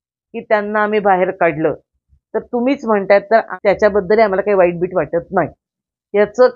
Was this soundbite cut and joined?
yes; 1 cut; at 3.5 s

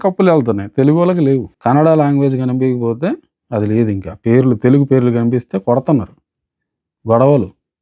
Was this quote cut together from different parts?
yes; 1 cut; at 1.5 s

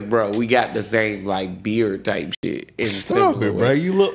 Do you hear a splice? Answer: yes; 1 cut; at 2.8 s

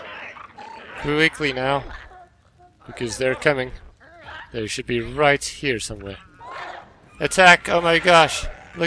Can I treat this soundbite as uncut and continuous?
yes; 0 cuts

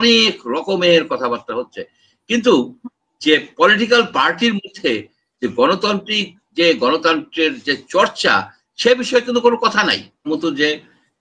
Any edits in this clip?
yes; 1 cut; at 10.3 s

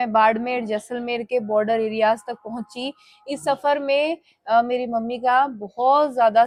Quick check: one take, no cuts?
yes; 0 cuts

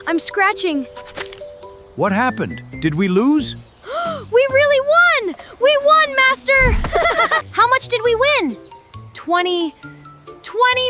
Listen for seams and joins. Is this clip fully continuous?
yes; 0 cuts

